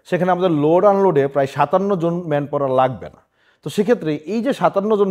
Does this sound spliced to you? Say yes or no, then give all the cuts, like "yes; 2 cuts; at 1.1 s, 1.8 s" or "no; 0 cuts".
no; 0 cuts